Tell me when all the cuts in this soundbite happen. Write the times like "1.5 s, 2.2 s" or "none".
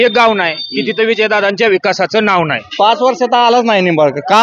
2.6 s